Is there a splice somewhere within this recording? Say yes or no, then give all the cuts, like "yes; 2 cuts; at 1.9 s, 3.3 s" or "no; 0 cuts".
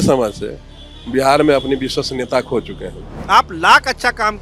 yes; 1 cut; at 3.1 s